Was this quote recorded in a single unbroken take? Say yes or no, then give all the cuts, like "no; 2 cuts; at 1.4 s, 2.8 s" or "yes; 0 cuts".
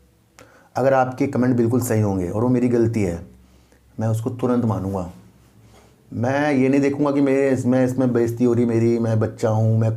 yes; 0 cuts